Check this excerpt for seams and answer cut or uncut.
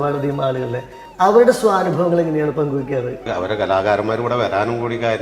cut